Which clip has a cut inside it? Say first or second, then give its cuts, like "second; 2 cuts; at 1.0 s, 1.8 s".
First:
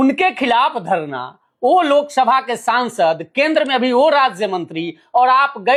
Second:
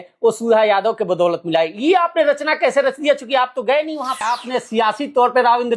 second; 1 cut; at 4.4 s